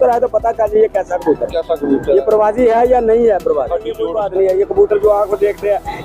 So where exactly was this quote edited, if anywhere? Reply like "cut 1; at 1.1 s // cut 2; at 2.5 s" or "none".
cut 1; at 4.0 s